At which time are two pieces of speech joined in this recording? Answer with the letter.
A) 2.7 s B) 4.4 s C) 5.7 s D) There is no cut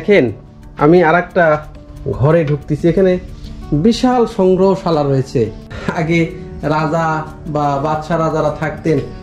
C